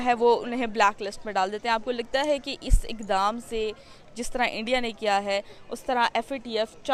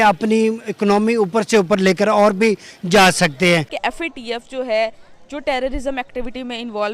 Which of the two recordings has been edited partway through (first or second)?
second